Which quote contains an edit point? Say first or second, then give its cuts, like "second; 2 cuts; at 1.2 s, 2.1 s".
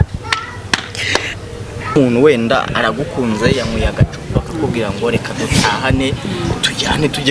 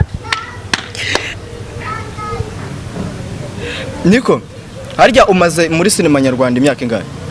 first; 1 cut; at 2.0 s